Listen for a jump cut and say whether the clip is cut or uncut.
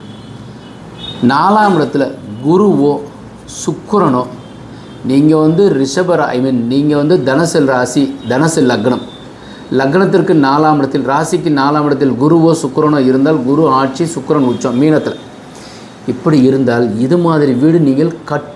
uncut